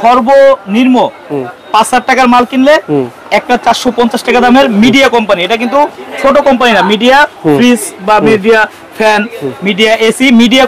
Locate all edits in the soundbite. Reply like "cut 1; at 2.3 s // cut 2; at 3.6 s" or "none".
none